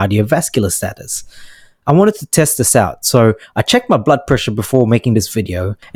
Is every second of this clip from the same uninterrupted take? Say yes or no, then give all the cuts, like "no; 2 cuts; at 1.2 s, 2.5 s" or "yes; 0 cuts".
yes; 0 cuts